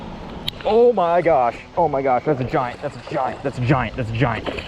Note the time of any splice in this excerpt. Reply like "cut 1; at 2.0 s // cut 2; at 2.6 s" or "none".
cut 1; at 1.6 s